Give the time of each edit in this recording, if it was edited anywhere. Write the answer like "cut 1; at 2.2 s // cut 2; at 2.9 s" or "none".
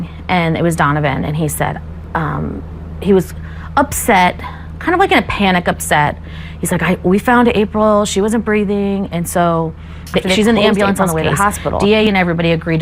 cut 1; at 11.8 s